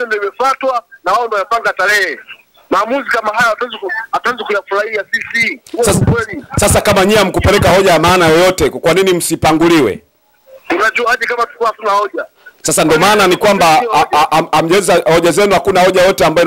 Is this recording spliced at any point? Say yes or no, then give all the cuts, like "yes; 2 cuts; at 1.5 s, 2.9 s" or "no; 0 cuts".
no; 0 cuts